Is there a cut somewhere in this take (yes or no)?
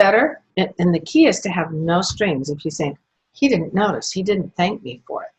no